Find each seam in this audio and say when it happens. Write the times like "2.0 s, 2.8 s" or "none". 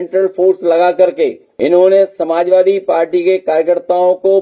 1.4 s